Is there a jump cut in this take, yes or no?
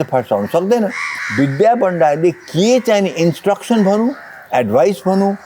yes